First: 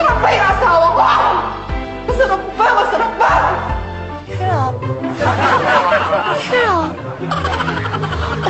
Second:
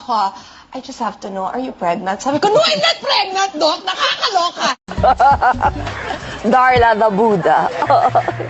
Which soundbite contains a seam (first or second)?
second